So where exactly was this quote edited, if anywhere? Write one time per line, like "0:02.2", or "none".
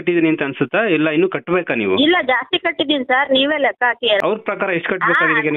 0:04.2